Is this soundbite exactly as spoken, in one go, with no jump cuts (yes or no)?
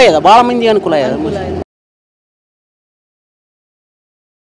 yes